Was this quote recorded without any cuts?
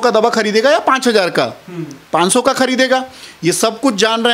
yes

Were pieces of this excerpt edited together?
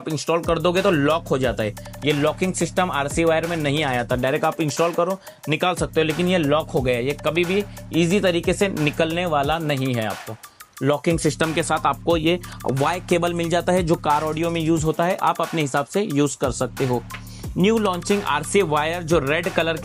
no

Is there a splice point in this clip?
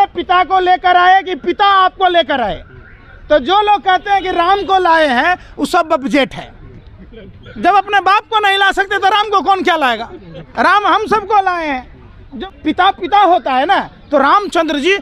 yes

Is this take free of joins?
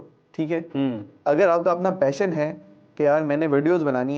no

